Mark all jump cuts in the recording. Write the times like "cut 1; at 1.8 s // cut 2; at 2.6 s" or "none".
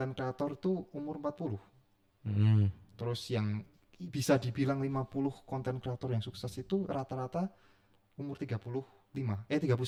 none